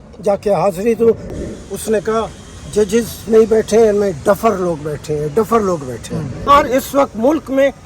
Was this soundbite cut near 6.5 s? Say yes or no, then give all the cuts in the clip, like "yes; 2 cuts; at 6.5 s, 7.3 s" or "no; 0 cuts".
yes; 2 cuts; at 1.3 s, 6.5 s